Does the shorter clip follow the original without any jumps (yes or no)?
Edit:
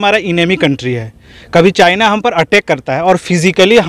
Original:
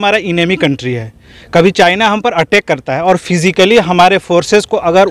yes